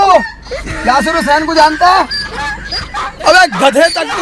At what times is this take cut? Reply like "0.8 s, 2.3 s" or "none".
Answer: none